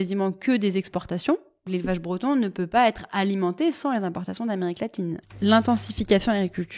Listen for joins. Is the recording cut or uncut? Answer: cut